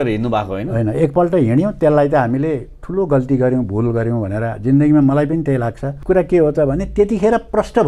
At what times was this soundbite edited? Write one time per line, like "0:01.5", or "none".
0:05.9